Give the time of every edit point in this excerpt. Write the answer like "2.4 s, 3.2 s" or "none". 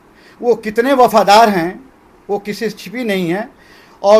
none